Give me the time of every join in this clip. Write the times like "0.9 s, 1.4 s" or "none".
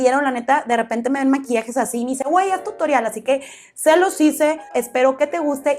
4.7 s

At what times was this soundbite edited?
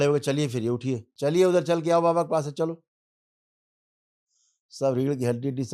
1.1 s

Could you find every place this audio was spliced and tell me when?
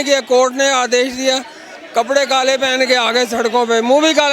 none

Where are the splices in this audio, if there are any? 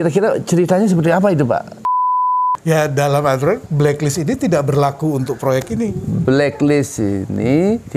2.1 s

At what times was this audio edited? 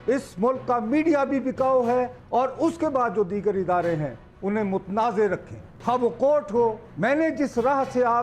6.8 s

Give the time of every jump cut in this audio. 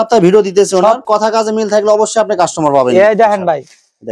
1.0 s

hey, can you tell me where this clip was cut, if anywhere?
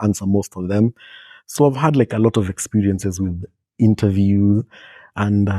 1.5 s

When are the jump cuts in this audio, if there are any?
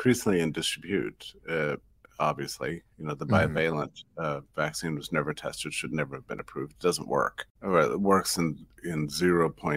7.5 s

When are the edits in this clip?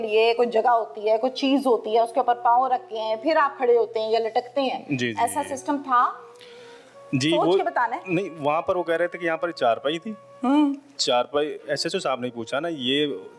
none

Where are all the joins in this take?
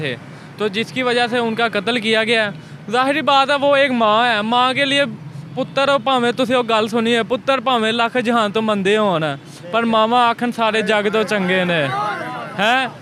none

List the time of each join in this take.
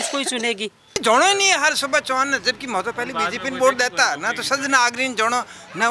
1.0 s

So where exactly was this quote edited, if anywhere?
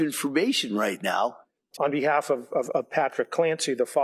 1.7 s

